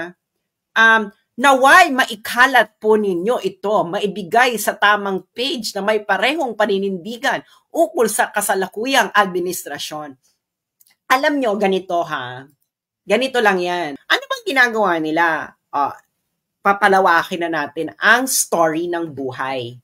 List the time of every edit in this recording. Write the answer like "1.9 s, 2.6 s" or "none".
14.0 s